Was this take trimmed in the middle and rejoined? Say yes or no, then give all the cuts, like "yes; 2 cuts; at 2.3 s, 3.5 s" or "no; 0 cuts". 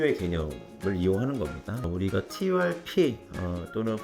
yes; 1 cut; at 1.8 s